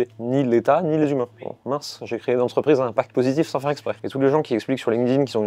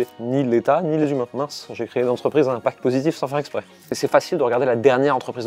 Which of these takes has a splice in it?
second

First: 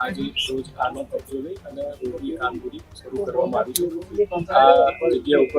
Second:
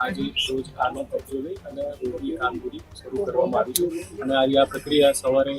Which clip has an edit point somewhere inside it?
second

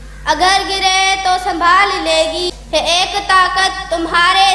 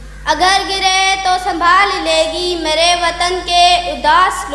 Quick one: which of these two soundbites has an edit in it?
first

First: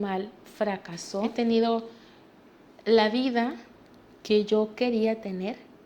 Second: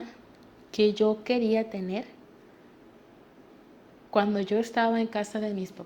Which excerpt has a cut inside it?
first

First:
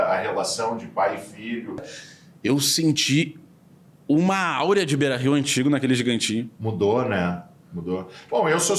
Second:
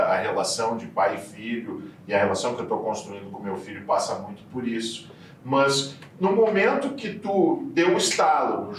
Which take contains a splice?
first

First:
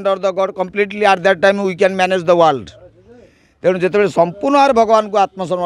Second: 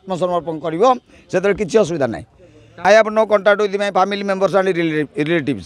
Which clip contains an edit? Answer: second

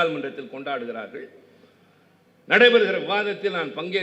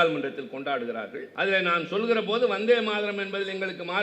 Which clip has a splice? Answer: second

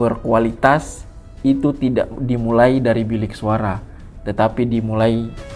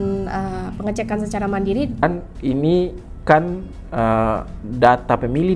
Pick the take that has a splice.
second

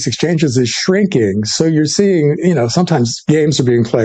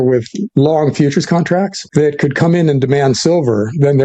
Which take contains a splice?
second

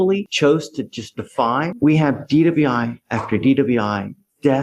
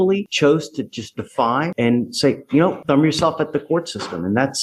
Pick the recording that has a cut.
first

